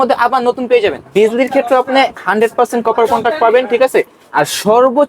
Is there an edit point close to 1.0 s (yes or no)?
yes